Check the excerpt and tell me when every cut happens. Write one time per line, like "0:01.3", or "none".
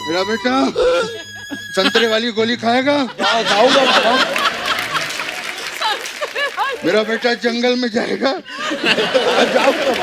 none